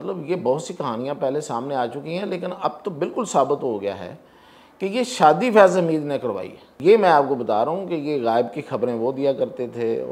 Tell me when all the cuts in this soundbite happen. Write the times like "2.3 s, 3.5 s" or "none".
6.6 s